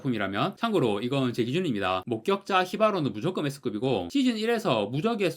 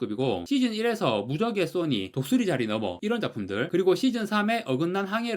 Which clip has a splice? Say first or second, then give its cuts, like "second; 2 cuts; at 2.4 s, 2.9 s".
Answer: first; 1 cut; at 2.0 s